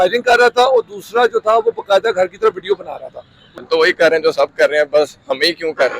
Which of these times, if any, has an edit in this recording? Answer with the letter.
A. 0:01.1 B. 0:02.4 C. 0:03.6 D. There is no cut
C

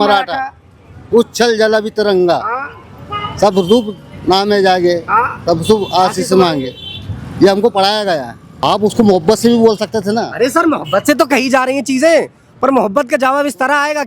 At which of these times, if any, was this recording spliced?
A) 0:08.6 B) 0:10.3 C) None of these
A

